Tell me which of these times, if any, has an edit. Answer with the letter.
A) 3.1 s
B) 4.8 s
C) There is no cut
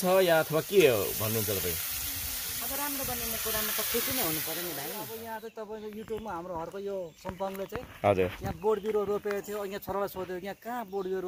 B